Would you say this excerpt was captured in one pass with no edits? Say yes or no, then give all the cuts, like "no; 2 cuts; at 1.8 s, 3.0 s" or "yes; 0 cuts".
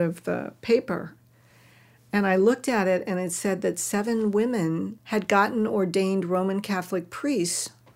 no; 1 cut; at 5.0 s